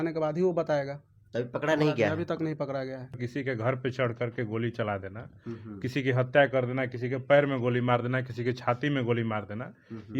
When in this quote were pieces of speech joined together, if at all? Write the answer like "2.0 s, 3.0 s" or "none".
3.1 s

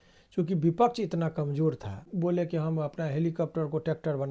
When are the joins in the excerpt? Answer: 2.0 s

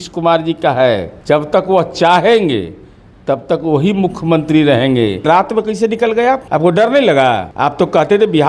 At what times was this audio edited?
1.1 s, 5.2 s, 6.4 s, 7.5 s

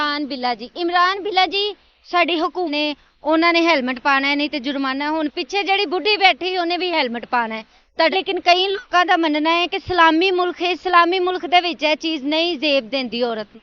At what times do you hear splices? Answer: 2.7 s, 8.1 s

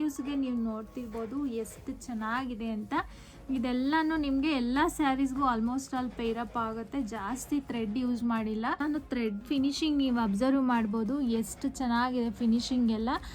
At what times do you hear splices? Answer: 8.8 s

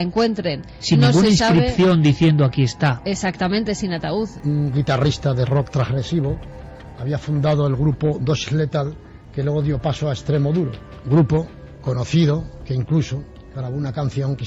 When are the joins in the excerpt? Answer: 4.4 s, 10.9 s

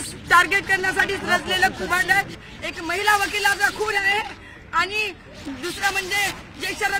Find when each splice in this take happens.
2.4 s

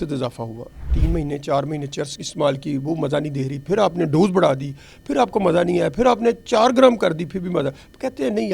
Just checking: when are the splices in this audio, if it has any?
0.9 s

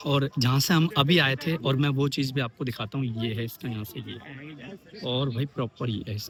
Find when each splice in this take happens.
none

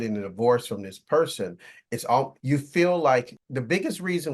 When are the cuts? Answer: 2.4 s, 3.4 s

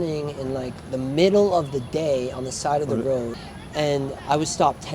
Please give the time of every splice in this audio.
3.4 s

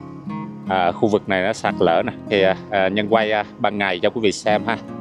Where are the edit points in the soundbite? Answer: 2.2 s

